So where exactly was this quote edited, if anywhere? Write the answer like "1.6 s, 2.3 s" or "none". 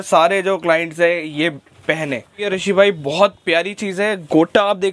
2.5 s